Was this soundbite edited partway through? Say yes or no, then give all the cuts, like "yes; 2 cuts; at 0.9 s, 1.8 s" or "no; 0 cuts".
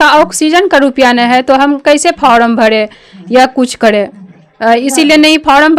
no; 0 cuts